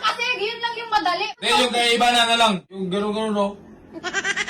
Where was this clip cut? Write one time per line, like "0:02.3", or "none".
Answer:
0:01.3
0:02.7

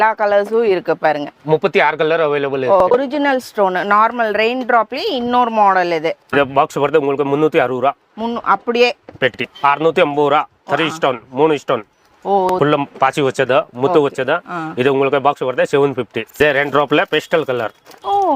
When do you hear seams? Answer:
0:02.9
0:06.3
0:09.5
0:12.5
0:16.2

